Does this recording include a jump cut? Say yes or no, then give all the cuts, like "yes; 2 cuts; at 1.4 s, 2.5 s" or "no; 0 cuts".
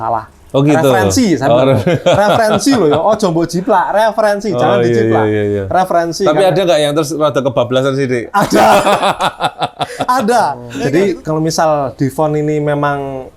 yes; 1 cut; at 10.7 s